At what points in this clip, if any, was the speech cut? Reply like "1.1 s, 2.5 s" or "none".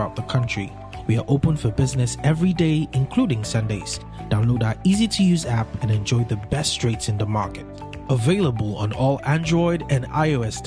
none